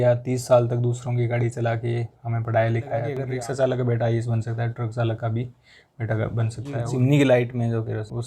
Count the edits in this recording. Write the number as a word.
two